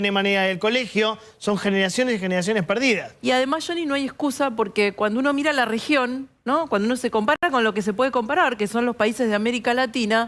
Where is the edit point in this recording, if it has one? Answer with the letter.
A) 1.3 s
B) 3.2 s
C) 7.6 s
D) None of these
D